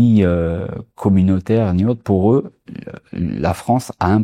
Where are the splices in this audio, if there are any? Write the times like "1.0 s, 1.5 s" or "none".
none